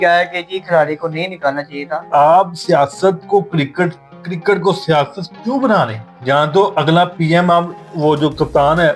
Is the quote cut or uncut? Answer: cut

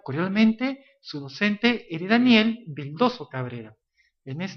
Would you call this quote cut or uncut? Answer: uncut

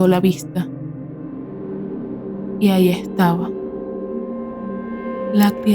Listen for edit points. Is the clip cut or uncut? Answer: cut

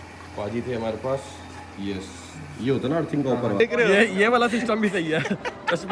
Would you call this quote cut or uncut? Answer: cut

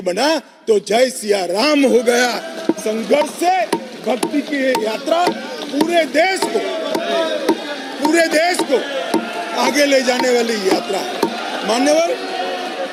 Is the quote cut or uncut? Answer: uncut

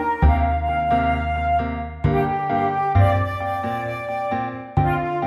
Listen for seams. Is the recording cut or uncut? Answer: cut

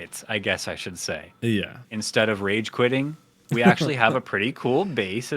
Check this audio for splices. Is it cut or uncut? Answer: cut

